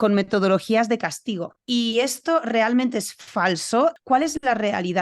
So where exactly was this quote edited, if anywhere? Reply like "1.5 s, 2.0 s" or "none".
1.5 s, 4.0 s